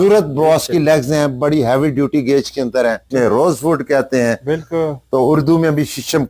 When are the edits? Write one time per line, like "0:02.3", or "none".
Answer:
0:03.1